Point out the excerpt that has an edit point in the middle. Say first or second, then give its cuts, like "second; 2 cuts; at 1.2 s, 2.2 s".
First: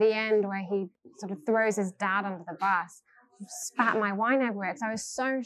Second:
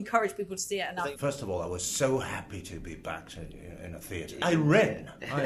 second; 2 cuts; at 1.1 s, 4.4 s